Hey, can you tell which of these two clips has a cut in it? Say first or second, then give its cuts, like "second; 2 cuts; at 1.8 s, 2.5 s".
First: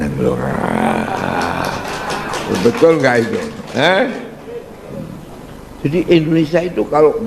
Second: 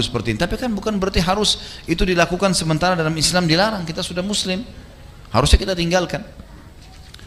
first; 1 cut; at 5.4 s